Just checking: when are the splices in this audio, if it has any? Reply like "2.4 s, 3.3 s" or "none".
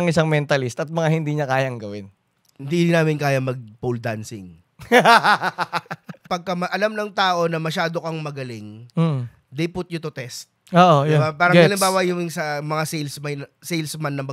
6.2 s

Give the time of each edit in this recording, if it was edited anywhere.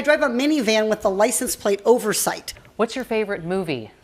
2.6 s

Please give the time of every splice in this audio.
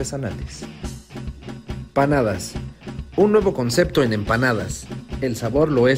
1.9 s

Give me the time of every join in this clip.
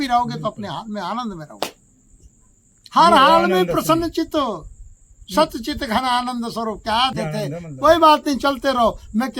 7.1 s

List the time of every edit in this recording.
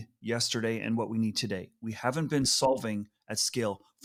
none

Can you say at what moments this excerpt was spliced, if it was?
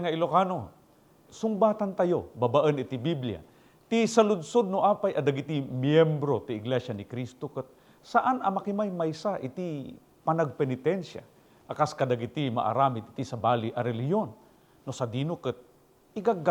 1.2 s

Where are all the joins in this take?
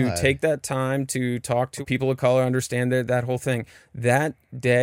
1.8 s

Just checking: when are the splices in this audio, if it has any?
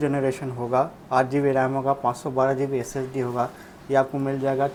none

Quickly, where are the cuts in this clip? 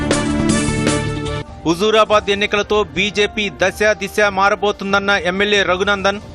none

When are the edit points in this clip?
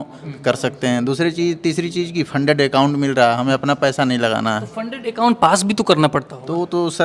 none

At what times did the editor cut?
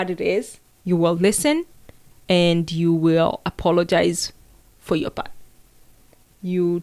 none

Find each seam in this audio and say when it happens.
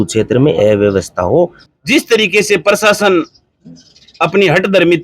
1.6 s

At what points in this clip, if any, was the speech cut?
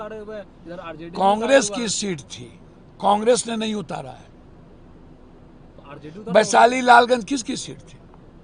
none

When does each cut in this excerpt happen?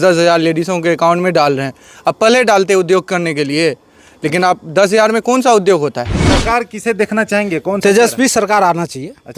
6.1 s

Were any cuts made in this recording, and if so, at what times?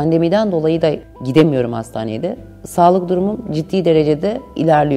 1.0 s

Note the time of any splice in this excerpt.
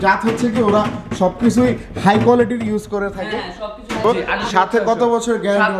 4.2 s

